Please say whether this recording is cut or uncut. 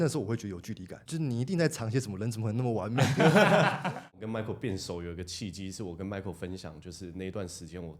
cut